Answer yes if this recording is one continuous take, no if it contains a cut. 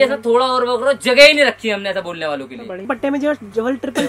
no